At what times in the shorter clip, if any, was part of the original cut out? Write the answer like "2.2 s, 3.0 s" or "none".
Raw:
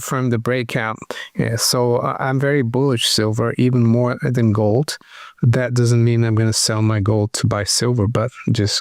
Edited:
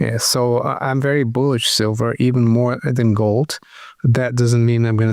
none